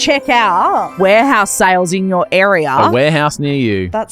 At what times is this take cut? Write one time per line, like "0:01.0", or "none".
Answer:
0:00.9
0:02.9